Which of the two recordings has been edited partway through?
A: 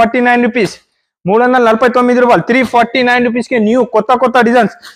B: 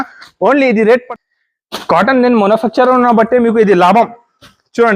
B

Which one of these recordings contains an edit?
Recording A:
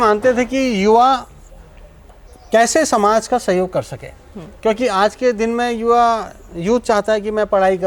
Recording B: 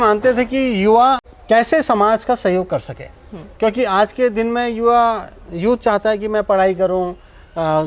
B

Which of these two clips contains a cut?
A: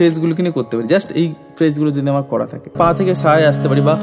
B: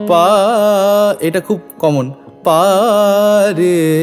A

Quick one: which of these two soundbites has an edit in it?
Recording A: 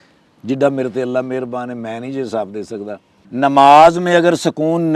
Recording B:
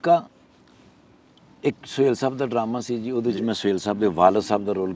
A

